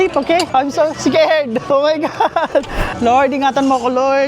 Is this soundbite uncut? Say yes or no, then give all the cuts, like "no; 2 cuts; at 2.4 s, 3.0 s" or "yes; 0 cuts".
no; 1 cut; at 2.9 s